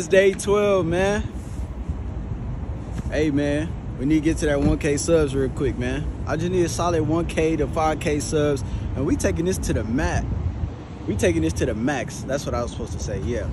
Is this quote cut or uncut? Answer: uncut